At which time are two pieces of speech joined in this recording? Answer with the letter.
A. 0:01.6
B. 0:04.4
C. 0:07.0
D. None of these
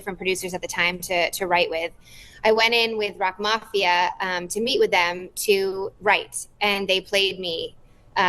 D